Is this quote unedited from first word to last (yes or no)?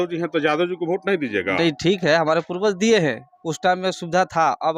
yes